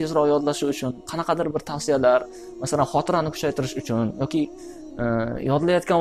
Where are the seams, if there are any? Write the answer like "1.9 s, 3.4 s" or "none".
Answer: none

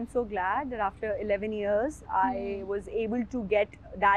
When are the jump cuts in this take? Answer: none

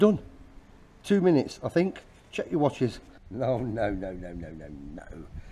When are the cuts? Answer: 3.0 s

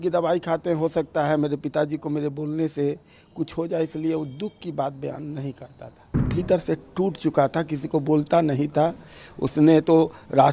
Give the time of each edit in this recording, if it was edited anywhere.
6.3 s

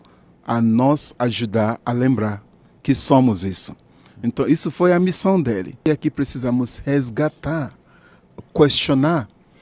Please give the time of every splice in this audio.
5.9 s

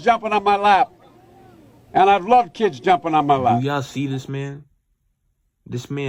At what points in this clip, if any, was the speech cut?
none

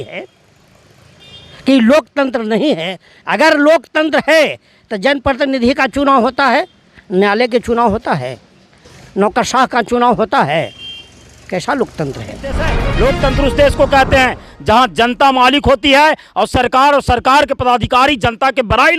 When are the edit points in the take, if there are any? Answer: 12.8 s

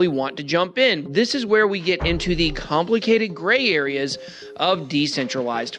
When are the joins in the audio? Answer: 1.0 s

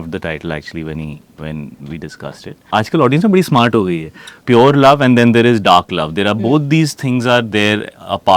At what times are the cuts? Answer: 2.7 s, 4.4 s

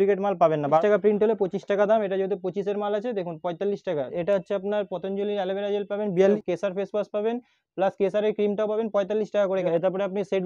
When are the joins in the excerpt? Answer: 0.8 s, 4.1 s, 6.4 s, 9.7 s

